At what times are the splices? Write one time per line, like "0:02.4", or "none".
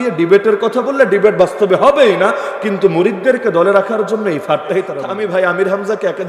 0:05.0